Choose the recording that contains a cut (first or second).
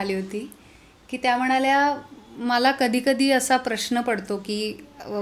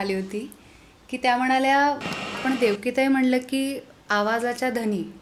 second